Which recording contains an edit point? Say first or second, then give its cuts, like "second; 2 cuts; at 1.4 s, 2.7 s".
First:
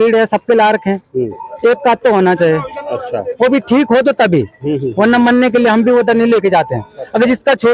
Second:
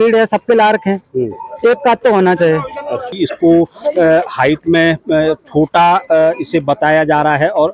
second; 1 cut; at 3.1 s